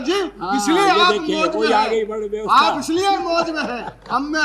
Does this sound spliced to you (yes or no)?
no